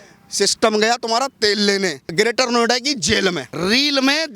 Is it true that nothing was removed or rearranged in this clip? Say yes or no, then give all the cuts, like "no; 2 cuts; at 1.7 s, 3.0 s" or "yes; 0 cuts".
no; 2 cuts; at 2.1 s, 3.5 s